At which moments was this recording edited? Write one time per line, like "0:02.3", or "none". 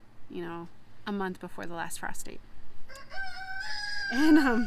none